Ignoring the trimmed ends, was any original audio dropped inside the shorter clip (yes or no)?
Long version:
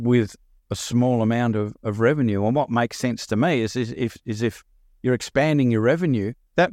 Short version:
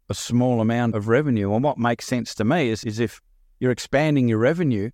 yes